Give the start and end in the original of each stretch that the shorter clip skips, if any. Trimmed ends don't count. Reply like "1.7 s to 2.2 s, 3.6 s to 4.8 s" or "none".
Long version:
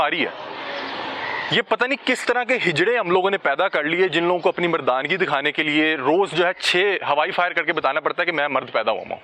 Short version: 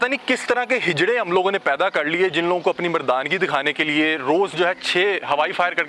none